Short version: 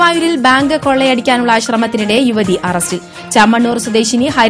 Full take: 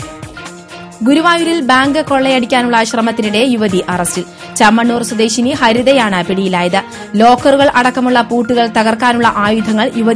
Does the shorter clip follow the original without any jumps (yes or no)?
yes